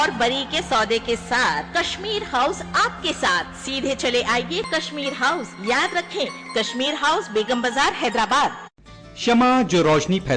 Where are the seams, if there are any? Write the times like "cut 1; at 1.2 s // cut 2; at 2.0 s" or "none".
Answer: cut 1; at 8.9 s